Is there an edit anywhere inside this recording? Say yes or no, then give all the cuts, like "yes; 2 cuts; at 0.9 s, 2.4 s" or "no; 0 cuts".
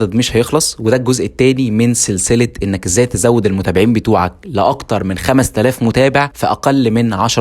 yes; 1 cut; at 6.3 s